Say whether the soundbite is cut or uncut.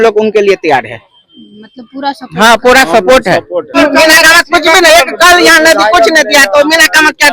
cut